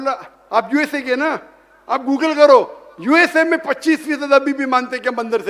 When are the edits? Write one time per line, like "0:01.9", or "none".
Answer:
none